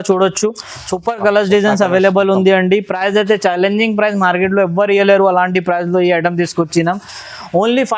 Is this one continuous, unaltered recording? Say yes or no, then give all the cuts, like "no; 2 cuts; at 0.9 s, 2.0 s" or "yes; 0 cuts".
yes; 0 cuts